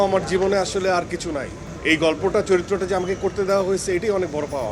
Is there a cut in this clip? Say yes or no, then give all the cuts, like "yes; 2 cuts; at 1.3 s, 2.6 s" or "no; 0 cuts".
no; 0 cuts